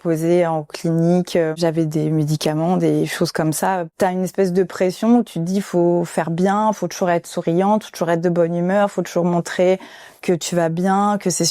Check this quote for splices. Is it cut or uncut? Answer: cut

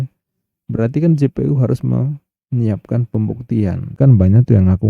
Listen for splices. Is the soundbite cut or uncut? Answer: cut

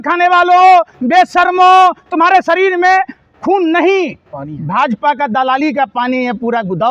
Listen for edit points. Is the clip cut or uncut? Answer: uncut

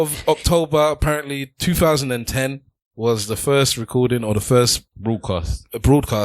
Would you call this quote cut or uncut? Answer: cut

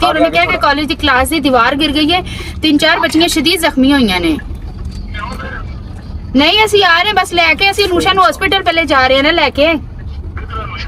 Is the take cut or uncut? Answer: uncut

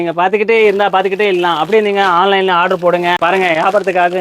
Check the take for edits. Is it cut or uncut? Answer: cut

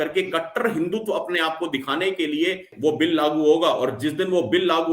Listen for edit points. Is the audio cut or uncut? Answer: cut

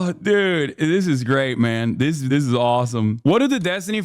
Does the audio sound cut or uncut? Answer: cut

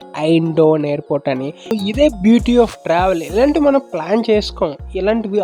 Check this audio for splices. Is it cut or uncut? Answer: cut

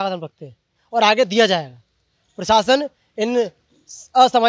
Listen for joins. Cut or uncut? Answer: uncut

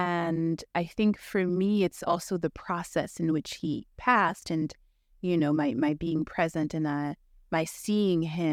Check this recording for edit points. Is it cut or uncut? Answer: uncut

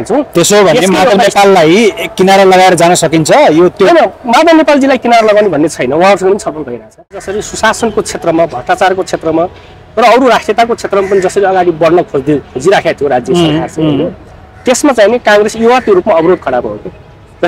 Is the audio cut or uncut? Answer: cut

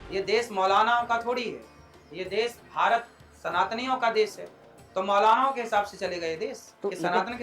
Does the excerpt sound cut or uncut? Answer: uncut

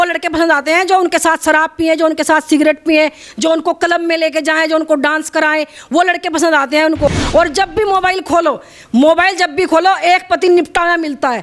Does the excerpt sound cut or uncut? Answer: cut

